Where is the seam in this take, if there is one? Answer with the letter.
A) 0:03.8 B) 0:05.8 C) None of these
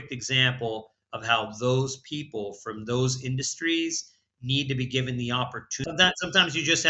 B